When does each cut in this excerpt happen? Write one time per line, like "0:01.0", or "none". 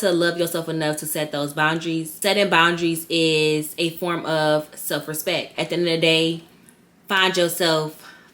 0:02.1
0:05.5